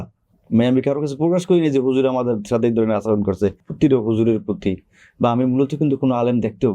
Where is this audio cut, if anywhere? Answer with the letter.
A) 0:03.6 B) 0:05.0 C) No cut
A